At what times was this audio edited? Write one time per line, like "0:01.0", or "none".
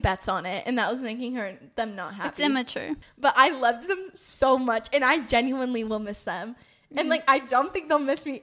0:03.0